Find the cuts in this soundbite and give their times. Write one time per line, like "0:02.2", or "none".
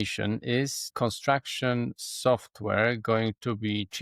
0:00.9